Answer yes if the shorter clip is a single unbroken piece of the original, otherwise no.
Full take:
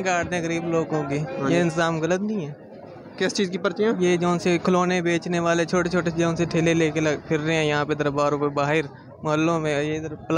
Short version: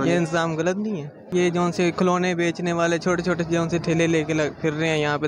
no